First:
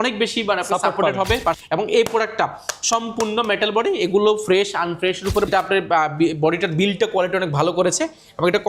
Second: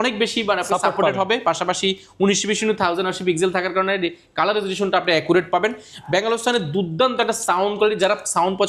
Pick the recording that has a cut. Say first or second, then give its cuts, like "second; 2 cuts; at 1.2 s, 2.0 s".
first; 2 cuts; at 1.6 s, 5.5 s